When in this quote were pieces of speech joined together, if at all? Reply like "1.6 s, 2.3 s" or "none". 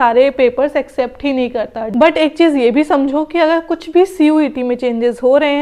1.8 s